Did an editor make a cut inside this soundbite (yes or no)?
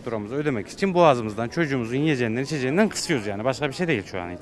no